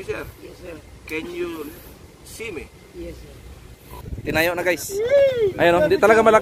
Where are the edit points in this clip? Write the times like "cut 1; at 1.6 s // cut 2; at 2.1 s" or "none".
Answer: cut 1; at 4.1 s